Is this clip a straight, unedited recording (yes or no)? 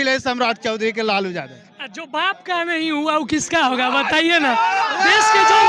yes